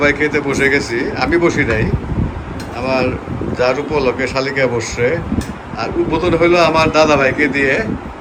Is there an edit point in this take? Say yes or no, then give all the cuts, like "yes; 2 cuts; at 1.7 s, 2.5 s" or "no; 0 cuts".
no; 0 cuts